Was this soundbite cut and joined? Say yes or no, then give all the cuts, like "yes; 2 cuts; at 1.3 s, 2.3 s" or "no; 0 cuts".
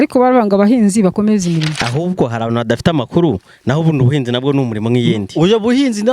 yes; 1 cut; at 1.8 s